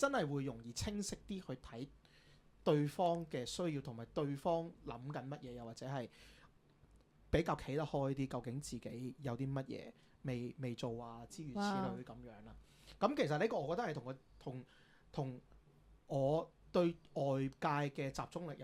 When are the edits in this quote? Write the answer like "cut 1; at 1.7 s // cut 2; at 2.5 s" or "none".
none